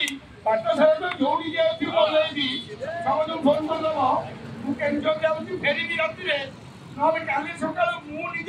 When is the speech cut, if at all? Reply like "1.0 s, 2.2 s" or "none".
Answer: none